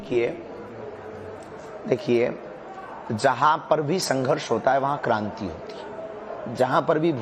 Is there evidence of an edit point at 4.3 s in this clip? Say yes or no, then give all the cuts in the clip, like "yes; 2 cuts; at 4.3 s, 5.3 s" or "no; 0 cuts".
yes; 1 cut; at 4.3 s